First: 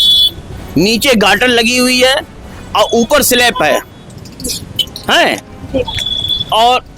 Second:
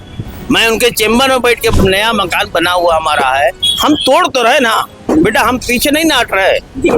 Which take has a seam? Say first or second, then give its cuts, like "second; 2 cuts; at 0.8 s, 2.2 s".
second; 1 cut; at 1.7 s